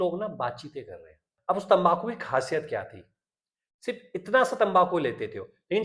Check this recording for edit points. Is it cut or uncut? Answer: cut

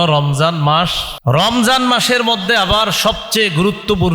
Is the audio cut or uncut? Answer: cut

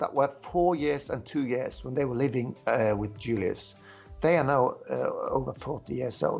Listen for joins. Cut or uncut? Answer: uncut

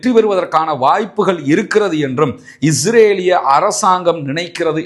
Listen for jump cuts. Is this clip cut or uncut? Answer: uncut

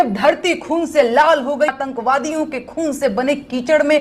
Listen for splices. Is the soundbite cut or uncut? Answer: cut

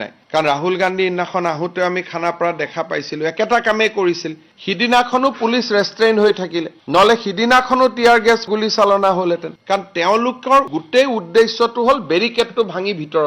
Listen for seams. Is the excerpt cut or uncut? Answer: uncut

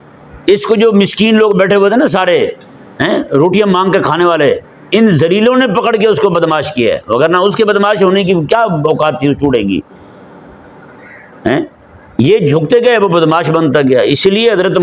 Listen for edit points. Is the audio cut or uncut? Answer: uncut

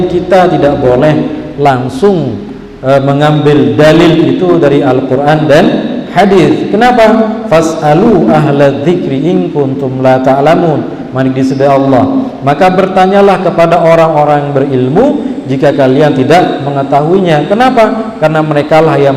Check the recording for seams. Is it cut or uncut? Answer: uncut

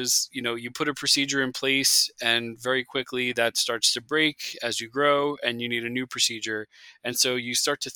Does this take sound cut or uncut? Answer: uncut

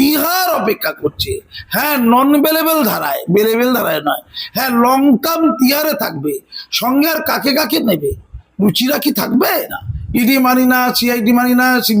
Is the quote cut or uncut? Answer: cut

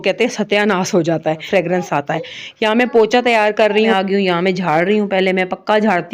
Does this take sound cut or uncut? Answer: cut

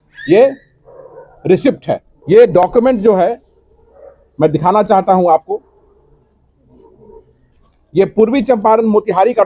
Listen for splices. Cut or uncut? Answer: cut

